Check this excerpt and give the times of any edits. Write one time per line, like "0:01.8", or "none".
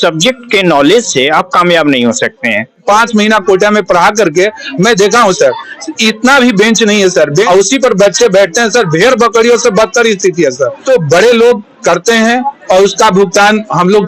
0:02.8
0:07.4
0:10.8